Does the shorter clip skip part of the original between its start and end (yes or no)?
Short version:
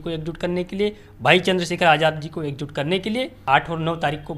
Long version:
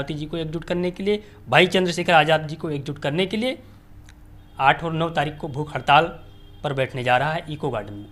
yes